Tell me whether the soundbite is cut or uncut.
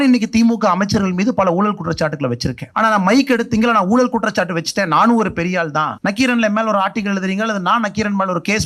cut